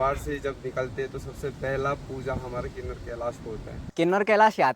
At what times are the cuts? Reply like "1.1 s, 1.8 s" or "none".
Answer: 3.8 s